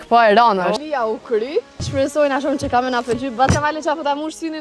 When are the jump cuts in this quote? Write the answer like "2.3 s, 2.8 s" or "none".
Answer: 0.8 s, 1.8 s